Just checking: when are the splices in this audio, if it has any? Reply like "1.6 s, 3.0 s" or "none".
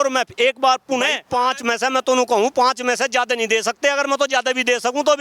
1.2 s